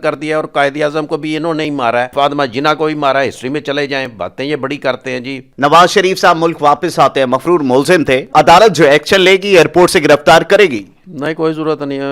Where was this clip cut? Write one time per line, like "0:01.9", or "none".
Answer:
0:02.1
0:05.4
0:08.3